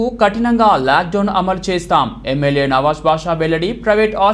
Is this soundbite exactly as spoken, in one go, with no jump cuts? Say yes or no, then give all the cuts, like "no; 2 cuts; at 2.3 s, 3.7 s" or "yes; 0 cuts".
yes; 0 cuts